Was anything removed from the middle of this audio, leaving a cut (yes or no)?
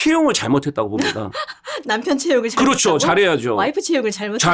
no